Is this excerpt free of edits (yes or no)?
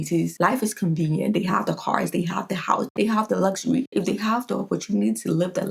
no